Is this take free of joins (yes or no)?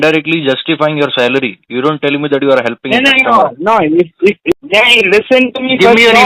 no